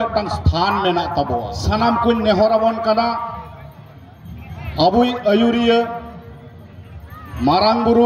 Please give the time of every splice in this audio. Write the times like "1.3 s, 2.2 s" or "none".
1.5 s

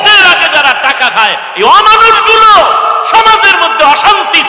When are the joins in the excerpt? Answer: none

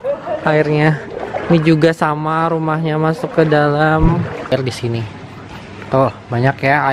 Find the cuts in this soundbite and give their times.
4.5 s

